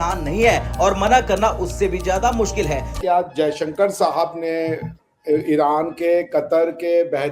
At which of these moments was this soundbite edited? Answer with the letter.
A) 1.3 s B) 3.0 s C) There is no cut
B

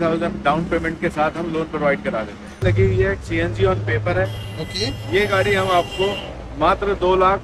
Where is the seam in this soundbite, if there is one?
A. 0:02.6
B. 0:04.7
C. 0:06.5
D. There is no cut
A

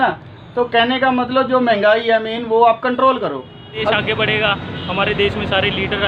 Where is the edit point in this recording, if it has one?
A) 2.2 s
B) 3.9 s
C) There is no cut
B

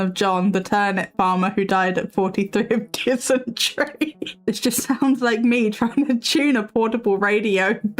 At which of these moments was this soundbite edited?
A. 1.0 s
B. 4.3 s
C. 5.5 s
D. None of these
B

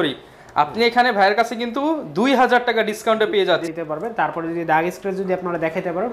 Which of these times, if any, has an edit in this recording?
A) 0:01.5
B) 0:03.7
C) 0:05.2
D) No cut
B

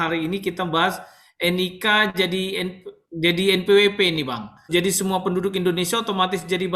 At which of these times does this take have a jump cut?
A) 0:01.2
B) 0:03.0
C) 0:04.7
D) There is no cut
C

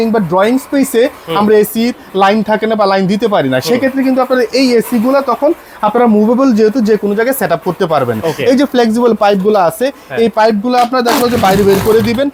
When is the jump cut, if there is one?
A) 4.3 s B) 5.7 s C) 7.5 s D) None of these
D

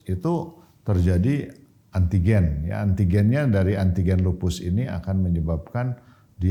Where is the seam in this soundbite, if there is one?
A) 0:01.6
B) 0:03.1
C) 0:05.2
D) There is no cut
D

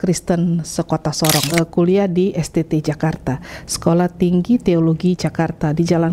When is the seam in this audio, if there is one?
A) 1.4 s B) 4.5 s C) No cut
A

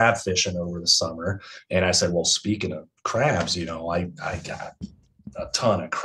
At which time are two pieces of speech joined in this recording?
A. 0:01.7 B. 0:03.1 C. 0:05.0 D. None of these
D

